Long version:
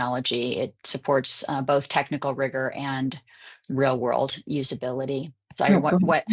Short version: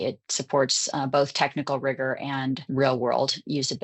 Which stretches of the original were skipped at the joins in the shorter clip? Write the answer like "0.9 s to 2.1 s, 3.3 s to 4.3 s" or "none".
3.2 s to 3.6 s